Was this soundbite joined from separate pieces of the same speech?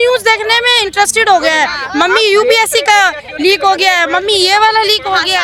no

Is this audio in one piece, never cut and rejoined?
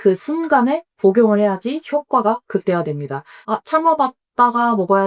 yes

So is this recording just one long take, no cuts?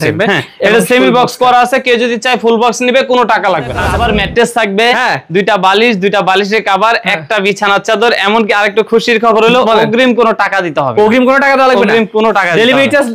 no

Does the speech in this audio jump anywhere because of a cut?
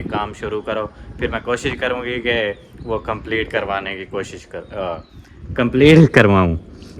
no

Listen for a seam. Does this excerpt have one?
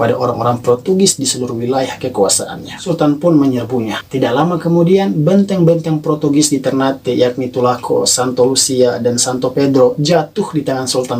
yes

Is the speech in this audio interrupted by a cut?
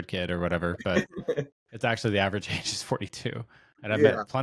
no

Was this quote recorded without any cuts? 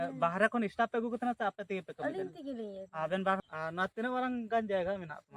no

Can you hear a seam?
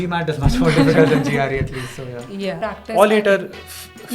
yes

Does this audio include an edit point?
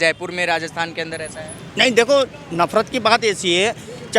no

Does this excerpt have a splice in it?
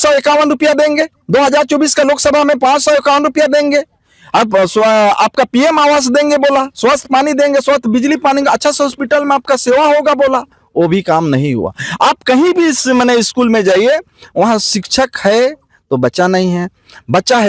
no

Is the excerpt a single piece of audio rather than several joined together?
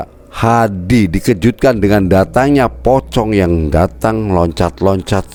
yes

